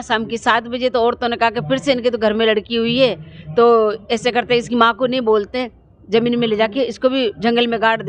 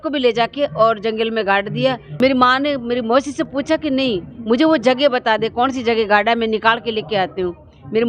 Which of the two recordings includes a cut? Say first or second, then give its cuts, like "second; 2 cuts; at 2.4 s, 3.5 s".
second; 1 cut; at 2.1 s